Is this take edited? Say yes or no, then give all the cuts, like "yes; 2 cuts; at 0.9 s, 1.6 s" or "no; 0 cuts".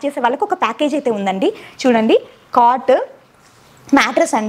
no; 0 cuts